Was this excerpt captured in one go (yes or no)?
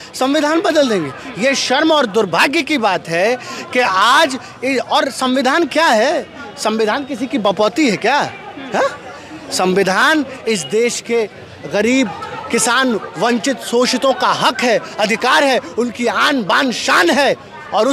yes